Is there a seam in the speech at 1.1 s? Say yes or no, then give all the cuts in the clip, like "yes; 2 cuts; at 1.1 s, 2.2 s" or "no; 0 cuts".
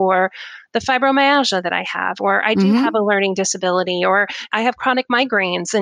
no; 1 cut; at 4.5 s